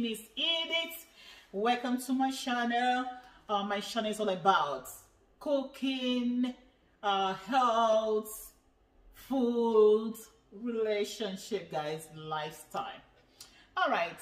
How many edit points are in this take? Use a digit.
0